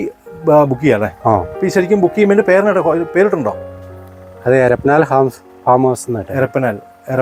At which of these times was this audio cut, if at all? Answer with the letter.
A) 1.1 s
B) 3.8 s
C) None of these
C